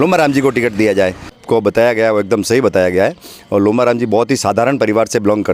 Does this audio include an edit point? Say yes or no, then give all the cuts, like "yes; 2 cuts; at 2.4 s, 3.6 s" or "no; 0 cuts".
yes; 1 cut; at 1.4 s